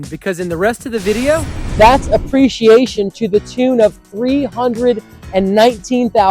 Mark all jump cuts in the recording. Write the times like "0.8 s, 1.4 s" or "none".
1.6 s